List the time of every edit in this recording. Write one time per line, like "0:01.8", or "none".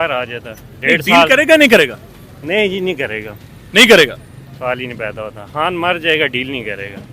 none